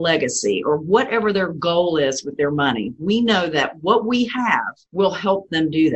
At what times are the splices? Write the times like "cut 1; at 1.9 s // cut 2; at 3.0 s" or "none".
cut 1; at 4.8 s